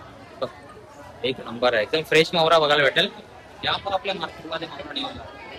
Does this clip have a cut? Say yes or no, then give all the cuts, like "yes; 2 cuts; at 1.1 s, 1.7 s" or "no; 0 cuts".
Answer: no; 0 cuts